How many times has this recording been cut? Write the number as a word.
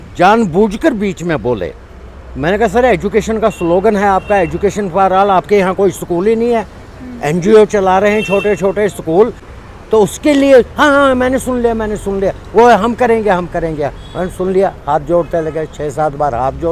one